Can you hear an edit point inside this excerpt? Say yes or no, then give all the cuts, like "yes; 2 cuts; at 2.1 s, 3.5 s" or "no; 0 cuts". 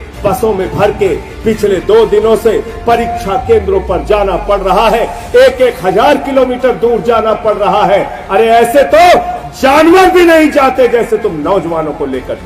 no; 0 cuts